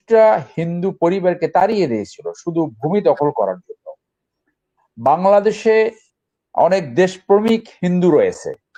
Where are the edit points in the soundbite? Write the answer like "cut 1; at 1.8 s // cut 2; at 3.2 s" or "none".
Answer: none